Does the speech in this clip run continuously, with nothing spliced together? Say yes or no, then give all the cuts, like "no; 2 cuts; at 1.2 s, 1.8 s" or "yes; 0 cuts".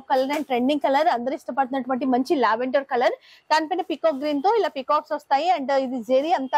yes; 0 cuts